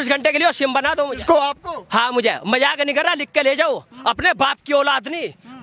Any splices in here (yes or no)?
no